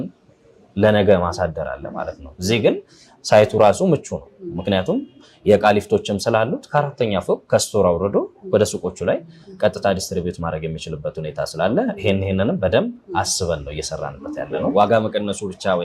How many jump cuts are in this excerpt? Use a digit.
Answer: 1